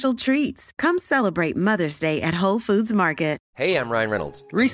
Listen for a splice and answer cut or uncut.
cut